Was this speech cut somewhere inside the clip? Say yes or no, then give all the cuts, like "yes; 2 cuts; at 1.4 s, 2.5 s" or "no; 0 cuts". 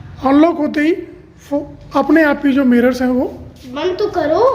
no; 0 cuts